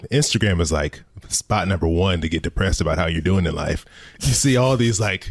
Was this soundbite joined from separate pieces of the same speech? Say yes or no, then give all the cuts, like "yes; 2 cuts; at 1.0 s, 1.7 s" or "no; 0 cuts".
yes; 1 cut; at 4.1 s